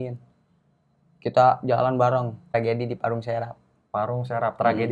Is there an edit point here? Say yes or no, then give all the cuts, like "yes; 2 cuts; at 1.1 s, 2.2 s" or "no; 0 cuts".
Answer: yes; 1 cut; at 2.4 s